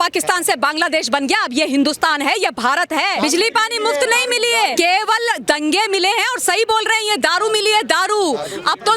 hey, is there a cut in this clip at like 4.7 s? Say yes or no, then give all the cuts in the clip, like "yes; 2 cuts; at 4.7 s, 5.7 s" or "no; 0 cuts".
yes; 2 cuts; at 3.2 s, 4.7 s